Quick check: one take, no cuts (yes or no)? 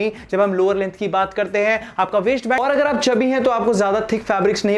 no